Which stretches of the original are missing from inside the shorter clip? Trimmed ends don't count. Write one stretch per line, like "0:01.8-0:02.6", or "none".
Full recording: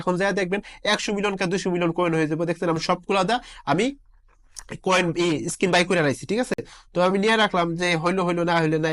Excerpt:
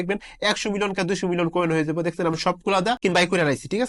0:03.4-0:05.6